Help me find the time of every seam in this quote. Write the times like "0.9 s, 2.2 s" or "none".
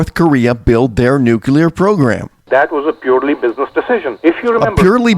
2.3 s, 4.1 s